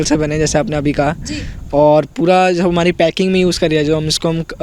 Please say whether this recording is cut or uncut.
uncut